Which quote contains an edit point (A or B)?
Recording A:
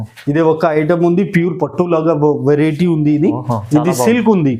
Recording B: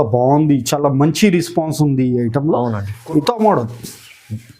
B